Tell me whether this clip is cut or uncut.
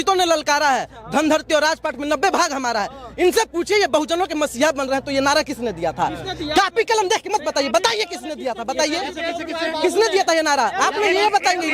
uncut